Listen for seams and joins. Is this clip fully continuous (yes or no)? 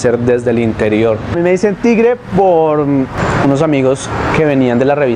yes